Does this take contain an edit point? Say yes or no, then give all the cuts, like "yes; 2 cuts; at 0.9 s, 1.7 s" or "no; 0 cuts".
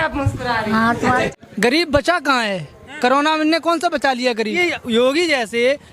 yes; 2 cuts; at 1.3 s, 4.6 s